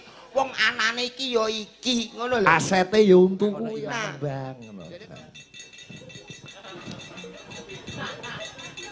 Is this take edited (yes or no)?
yes